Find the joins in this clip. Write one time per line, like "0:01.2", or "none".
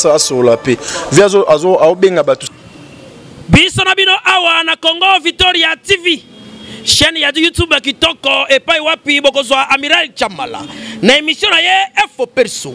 0:02.5